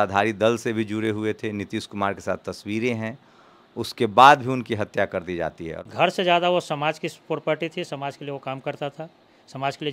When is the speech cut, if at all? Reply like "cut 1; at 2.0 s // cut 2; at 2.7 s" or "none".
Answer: cut 1; at 5.7 s

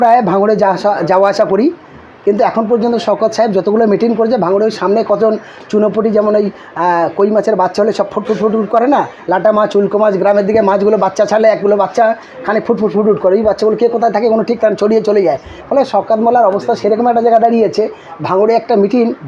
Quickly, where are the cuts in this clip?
none

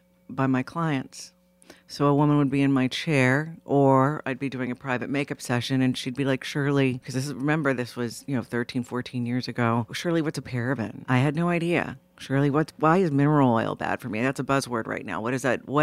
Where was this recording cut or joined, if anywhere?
cut 1; at 7.1 s // cut 2; at 10.0 s // cut 3; at 11.0 s

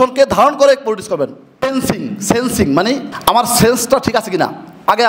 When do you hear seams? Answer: cut 1; at 1.6 s // cut 2; at 3.1 s

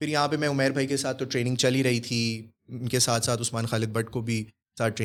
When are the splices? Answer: none

